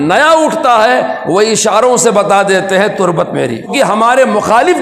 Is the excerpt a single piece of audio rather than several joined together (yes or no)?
no